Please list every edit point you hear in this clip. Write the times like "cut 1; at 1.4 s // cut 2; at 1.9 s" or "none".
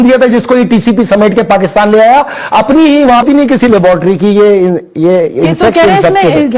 cut 1; at 3.2 s